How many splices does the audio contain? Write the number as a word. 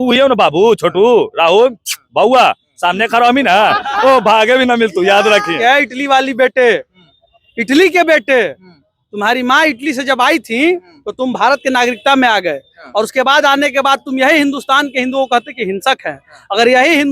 one